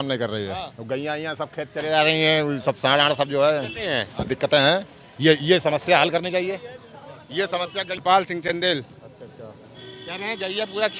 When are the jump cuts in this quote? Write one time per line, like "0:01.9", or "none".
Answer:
none